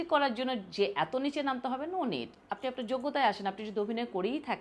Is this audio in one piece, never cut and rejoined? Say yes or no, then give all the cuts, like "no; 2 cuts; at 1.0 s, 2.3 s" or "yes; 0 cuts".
yes; 0 cuts